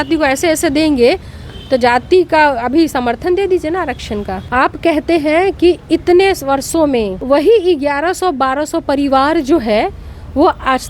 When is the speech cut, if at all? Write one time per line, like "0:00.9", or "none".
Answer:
0:04.4
0:07.2